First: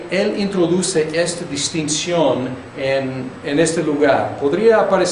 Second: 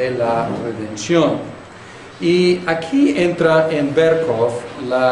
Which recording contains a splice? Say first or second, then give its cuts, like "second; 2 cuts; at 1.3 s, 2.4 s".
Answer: second; 1 cut; at 3.1 s